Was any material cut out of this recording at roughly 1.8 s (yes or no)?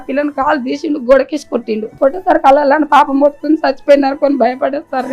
yes